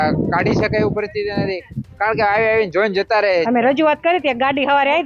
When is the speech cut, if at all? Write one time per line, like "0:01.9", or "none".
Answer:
0:03.5